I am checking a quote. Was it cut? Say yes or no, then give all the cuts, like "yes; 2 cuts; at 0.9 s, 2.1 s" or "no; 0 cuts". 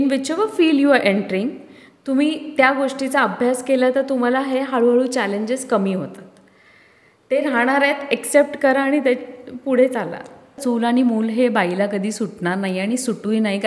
yes; 1 cut; at 10.6 s